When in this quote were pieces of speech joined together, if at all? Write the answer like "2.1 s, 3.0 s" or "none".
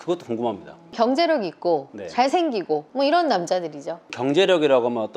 0.9 s, 2.9 s, 4.2 s